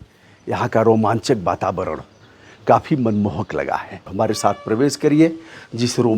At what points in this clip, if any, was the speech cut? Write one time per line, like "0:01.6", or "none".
0:04.1